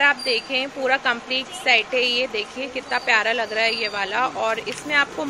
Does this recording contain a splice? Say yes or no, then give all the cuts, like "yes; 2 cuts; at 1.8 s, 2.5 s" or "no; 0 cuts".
no; 0 cuts